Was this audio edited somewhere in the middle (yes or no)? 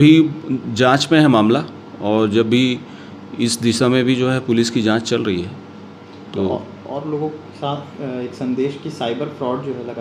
no